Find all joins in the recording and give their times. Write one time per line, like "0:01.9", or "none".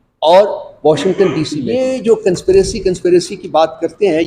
0:01.6